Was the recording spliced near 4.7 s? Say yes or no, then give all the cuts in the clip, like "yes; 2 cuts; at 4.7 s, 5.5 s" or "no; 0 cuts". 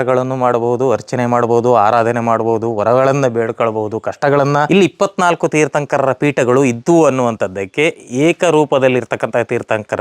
yes; 1 cut; at 4.7 s